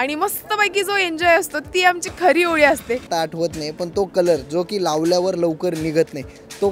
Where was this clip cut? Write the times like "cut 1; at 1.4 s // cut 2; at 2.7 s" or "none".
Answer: cut 1; at 3.1 s